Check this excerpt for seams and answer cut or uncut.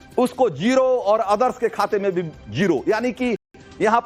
uncut